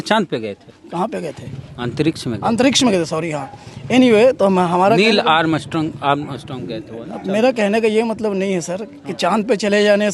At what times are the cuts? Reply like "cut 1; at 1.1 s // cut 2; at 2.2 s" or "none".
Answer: none